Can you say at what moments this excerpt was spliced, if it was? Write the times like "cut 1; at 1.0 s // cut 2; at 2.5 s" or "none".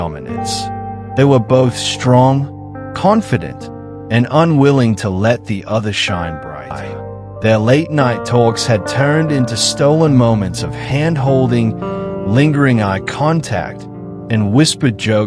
cut 1; at 6.9 s

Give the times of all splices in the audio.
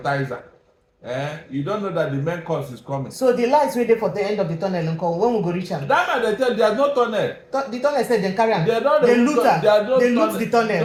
none

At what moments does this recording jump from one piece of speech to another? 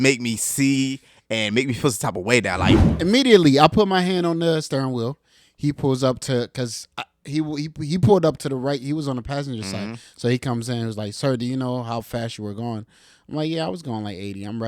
cut 1; at 2.9 s

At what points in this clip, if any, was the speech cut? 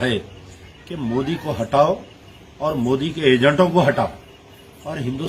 none

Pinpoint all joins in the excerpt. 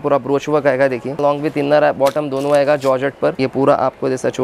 cut 1; at 1.2 s // cut 2; at 3.4 s

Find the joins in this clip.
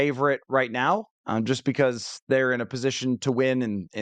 none

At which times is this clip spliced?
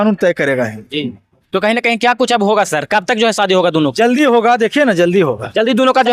none

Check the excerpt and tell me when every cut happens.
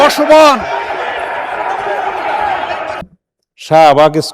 cut 1; at 3.0 s

